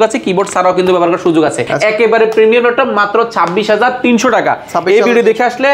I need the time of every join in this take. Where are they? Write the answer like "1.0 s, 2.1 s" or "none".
none